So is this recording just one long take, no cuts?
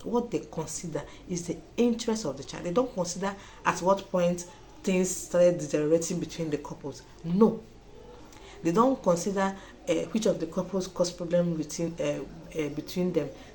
yes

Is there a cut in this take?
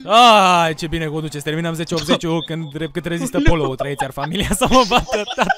no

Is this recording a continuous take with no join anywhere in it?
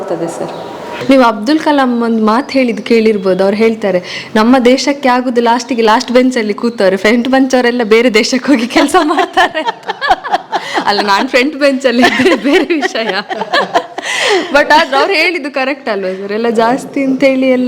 no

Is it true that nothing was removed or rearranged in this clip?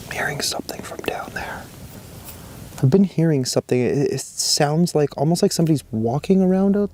yes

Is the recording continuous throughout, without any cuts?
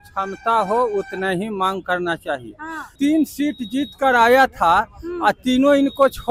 no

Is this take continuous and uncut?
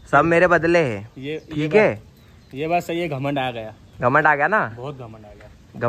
yes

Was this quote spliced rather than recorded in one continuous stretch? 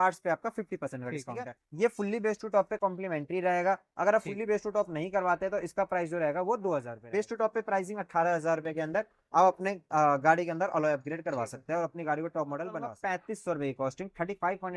yes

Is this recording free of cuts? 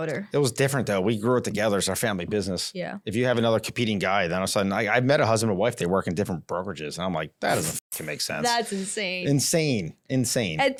yes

